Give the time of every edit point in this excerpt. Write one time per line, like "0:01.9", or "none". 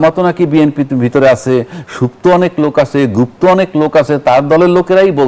none